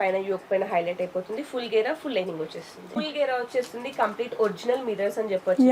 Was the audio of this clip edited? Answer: yes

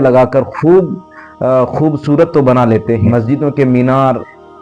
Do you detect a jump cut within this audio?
yes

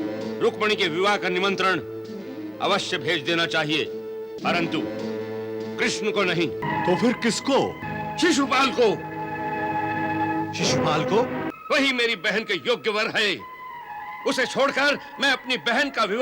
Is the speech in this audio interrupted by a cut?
yes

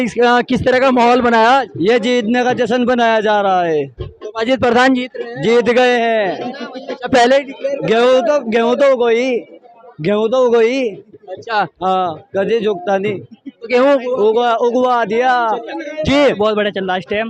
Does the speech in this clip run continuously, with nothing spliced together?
no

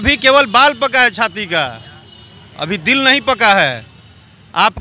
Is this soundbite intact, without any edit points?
yes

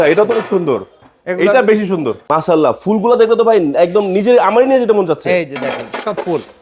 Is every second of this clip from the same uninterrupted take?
no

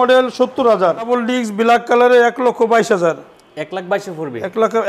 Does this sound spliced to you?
yes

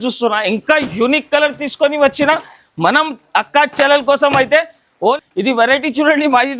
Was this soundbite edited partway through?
yes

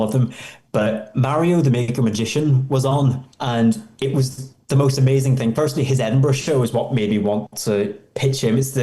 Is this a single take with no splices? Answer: no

